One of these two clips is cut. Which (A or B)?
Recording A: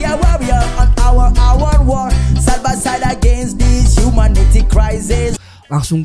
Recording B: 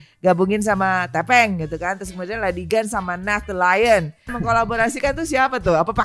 B